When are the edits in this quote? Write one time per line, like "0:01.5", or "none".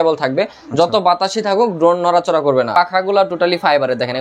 0:02.7